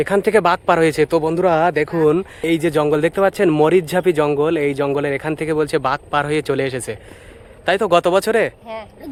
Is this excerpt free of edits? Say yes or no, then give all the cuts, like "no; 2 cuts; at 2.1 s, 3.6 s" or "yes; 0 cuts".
yes; 0 cuts